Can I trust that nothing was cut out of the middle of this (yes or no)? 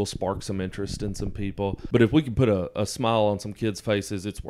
no